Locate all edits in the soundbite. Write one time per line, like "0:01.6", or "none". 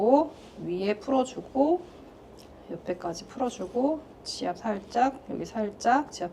none